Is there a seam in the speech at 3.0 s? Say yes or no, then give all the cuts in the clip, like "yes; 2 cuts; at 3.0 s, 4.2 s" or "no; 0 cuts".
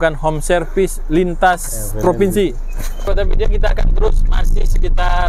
yes; 1 cut; at 3.0 s